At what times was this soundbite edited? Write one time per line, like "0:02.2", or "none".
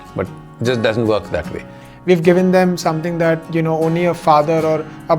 0:02.0